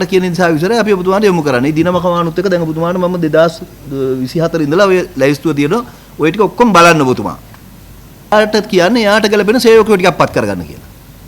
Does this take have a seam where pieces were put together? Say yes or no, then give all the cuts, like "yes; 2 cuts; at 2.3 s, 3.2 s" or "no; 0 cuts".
yes; 1 cut; at 8.3 s